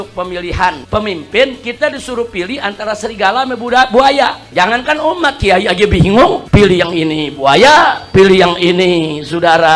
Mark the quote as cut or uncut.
cut